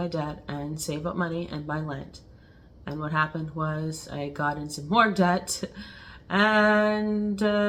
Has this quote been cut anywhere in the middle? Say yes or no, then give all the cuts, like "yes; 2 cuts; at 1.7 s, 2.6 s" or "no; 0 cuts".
no; 0 cuts